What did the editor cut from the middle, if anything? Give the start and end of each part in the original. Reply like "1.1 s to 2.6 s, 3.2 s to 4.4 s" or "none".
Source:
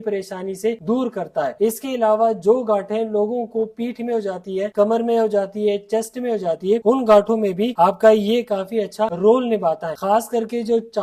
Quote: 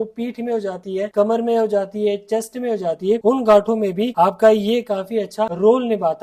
none